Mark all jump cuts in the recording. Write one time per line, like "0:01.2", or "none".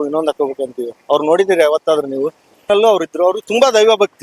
0:02.6